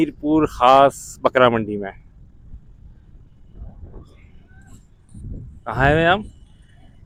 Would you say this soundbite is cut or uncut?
uncut